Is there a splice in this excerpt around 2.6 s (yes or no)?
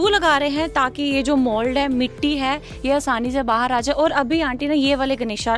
no